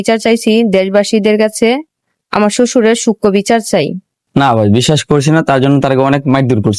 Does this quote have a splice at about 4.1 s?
yes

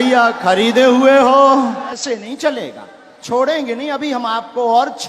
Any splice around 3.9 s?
no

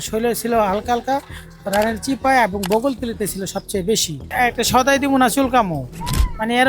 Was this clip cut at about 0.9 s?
no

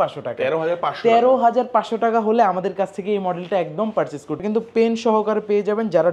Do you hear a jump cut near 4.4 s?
yes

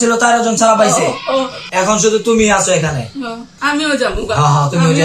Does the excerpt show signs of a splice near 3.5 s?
yes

